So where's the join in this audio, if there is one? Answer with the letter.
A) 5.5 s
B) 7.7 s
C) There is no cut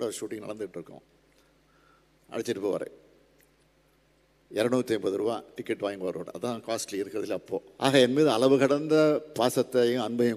B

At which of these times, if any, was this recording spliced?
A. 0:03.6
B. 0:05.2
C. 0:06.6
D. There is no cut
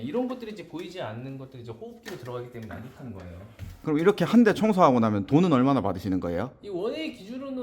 A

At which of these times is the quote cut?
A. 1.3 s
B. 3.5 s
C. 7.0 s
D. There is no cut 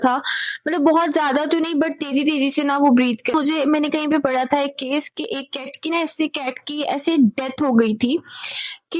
D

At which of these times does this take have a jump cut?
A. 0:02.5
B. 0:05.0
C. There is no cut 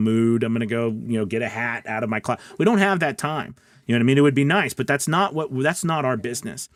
C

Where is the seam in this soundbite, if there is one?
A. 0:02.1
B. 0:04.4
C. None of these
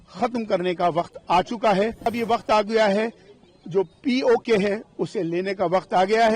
A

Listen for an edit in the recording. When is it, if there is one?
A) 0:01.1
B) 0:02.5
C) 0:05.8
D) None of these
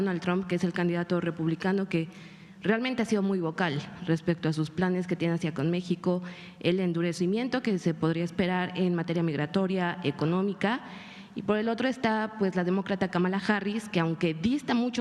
D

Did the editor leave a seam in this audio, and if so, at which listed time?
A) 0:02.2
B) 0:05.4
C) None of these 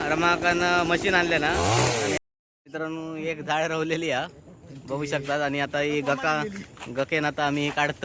A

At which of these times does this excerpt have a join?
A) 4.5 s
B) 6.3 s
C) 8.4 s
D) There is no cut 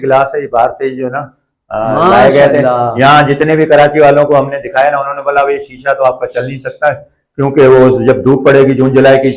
D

